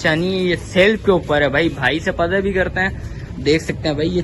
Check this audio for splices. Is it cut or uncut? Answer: uncut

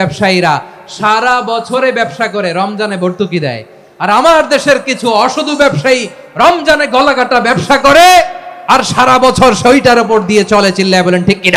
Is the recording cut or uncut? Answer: uncut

